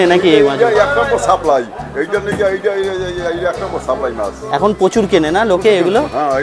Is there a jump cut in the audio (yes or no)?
no